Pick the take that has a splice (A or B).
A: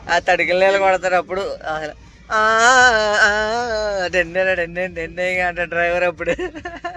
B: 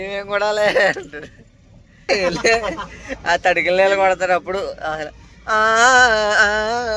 B